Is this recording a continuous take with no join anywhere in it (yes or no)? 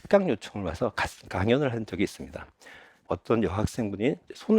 no